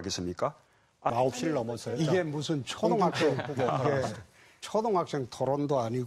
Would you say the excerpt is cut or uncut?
cut